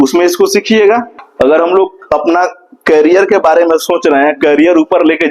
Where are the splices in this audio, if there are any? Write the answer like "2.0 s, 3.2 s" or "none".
1.2 s